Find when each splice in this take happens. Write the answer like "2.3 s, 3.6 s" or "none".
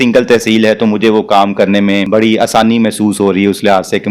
2.1 s

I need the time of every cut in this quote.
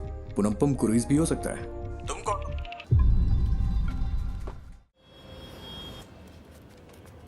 2.7 s, 5.0 s

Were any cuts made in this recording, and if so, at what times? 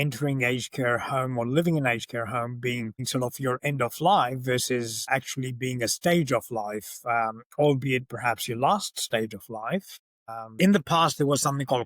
10.5 s

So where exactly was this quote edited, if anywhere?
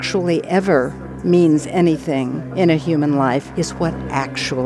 1.0 s, 2.4 s, 3.5 s

